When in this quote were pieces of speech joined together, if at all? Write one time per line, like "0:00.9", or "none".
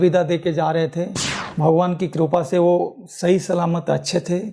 0:01.4